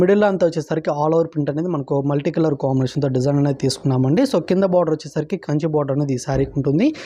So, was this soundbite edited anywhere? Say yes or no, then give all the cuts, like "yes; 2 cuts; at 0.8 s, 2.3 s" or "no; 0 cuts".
no; 0 cuts